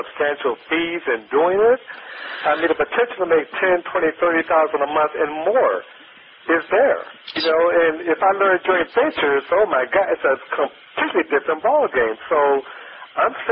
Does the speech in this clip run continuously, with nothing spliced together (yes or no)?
yes